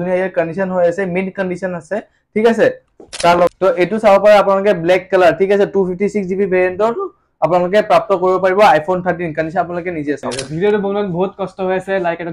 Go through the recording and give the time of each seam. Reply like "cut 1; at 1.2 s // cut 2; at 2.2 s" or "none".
cut 1; at 3.5 s // cut 2; at 10.6 s